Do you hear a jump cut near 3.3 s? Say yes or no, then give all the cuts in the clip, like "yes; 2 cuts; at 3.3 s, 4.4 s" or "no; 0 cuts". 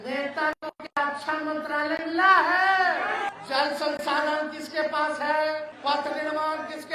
yes; 2 cuts; at 3.3 s, 5.7 s